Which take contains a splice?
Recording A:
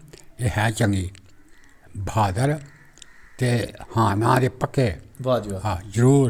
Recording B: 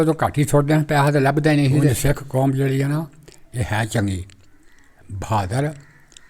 B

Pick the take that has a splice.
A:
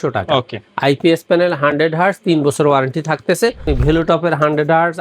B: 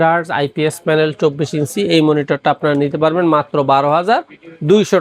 A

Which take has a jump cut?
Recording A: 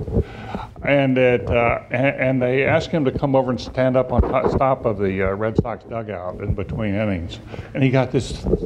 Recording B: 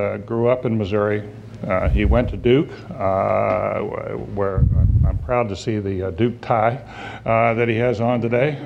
A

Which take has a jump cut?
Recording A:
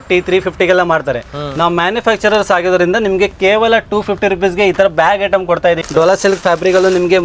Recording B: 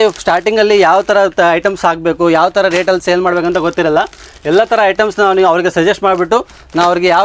A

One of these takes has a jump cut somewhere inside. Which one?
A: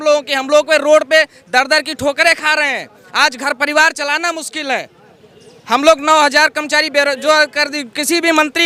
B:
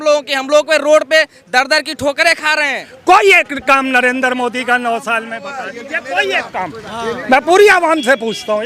B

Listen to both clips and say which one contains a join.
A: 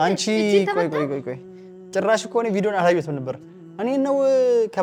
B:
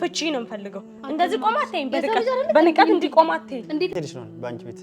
B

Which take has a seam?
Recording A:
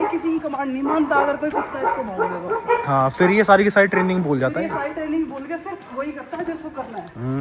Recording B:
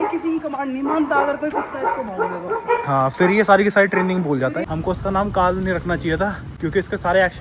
B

